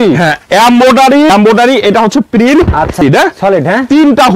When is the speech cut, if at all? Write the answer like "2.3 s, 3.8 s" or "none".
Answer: 1.3 s, 3.0 s